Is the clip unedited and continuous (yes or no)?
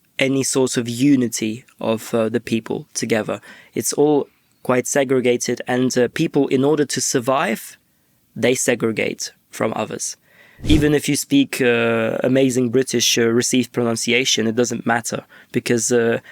no